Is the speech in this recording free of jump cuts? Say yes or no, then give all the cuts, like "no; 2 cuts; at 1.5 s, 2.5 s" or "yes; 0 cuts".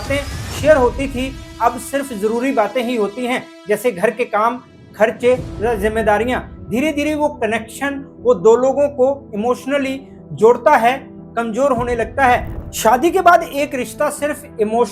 no; 1 cut; at 12.5 s